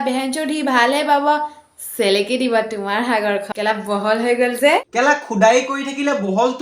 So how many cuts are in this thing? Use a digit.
1